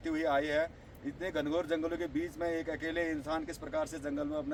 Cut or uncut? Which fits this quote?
uncut